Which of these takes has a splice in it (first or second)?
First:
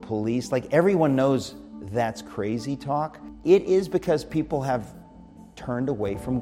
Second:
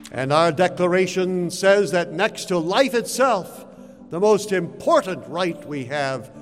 first